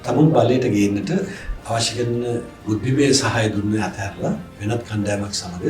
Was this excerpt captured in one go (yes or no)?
no